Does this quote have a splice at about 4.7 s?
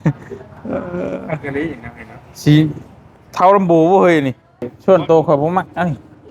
yes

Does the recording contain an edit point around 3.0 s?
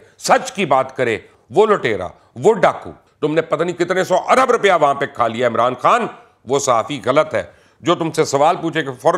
yes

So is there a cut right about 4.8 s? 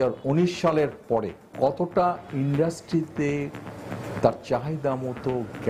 no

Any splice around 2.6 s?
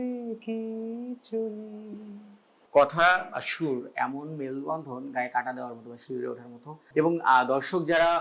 no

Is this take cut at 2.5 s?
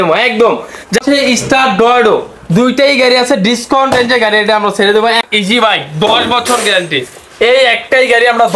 no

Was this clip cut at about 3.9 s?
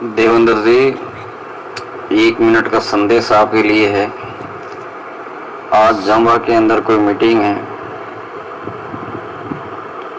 no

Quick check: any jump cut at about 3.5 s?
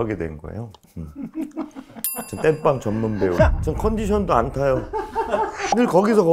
yes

